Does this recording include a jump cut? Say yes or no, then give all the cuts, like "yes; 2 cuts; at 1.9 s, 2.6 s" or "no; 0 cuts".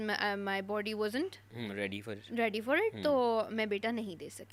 no; 0 cuts